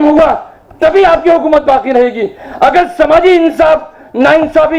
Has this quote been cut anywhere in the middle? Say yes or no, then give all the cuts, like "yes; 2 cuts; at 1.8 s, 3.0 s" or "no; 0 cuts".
no; 0 cuts